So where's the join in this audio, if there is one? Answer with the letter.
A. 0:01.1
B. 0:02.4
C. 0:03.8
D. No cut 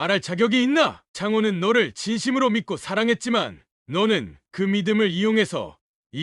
D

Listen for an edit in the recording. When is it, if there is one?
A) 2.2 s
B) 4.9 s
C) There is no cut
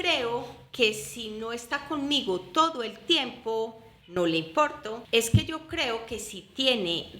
B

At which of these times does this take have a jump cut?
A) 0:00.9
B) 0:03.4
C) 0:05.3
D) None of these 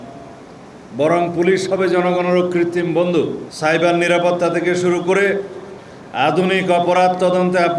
B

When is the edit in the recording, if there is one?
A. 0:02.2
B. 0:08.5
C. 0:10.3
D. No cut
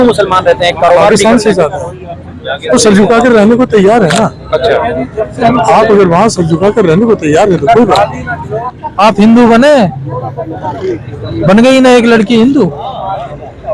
B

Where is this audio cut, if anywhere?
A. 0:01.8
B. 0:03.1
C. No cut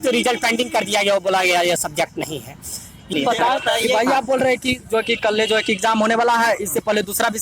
B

